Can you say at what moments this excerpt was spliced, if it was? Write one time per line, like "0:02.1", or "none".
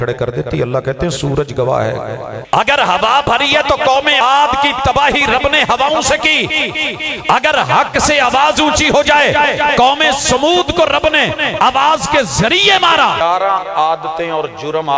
0:02.3
0:04.2
0:13.2